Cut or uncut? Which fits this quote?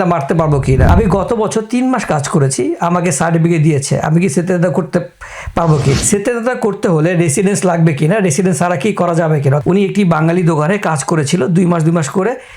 cut